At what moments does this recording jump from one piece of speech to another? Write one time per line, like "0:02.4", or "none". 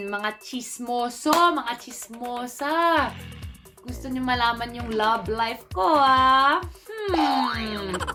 none